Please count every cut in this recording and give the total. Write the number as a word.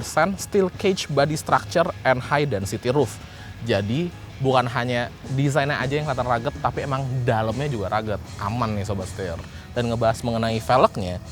zero